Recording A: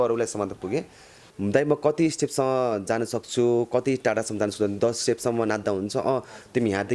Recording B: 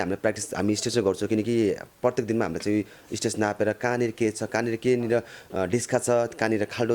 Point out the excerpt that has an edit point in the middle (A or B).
A